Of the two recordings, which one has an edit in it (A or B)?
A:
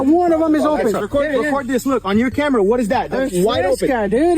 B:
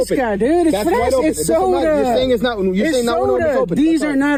A